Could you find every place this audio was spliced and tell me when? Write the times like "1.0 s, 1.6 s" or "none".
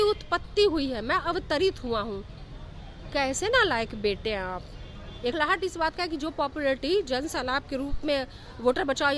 5.3 s

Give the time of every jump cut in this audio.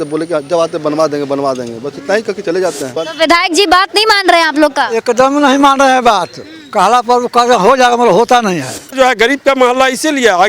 2.9 s, 8.9 s

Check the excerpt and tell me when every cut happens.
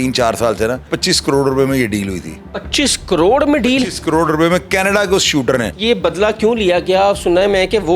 0.9 s, 5.7 s

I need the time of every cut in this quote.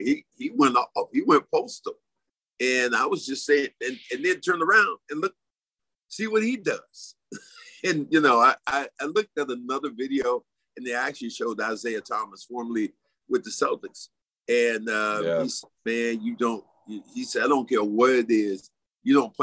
none

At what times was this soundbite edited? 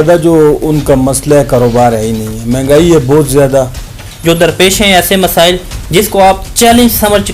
3.7 s

